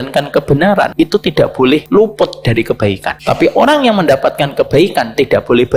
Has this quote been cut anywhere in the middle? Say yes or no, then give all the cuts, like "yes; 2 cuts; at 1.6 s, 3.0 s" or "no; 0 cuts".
yes; 3 cuts; at 0.9 s, 1.8 s, 3.1 s